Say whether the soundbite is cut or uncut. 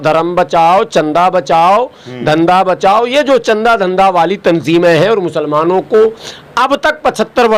uncut